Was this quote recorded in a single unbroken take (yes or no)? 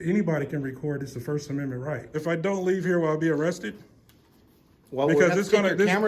no